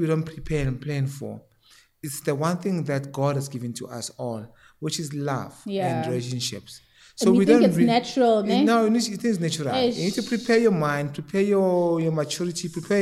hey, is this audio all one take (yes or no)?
yes